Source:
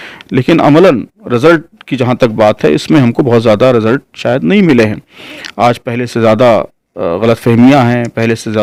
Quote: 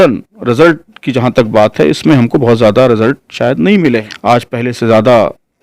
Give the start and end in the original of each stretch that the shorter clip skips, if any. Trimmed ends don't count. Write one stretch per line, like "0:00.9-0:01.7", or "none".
0:04.9-0:05.4